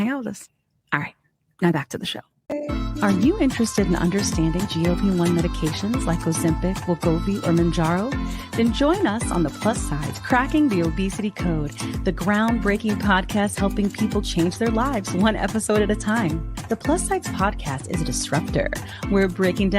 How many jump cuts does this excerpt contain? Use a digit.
1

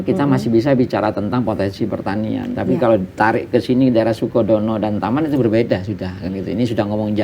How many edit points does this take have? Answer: 0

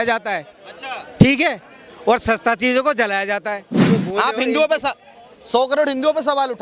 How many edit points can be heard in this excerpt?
1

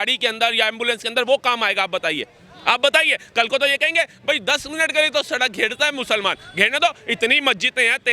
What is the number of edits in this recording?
0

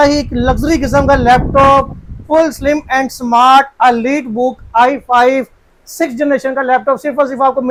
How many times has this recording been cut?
0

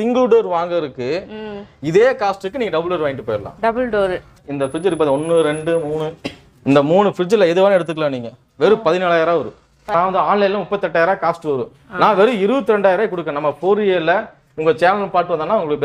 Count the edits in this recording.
2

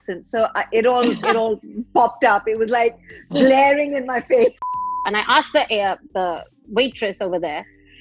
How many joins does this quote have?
1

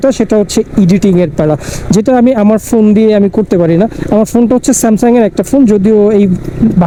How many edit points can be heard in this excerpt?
0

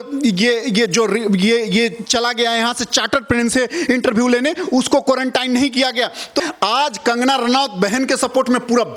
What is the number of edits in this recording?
1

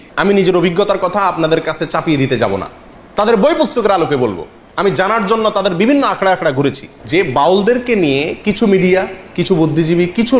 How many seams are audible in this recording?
1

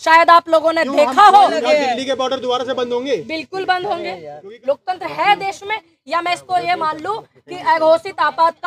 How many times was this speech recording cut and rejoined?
2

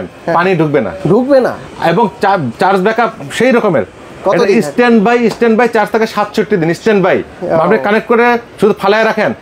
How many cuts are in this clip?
0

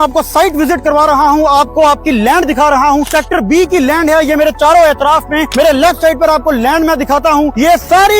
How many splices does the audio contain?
1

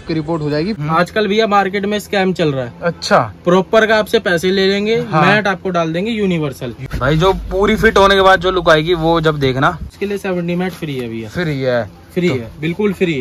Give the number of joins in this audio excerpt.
3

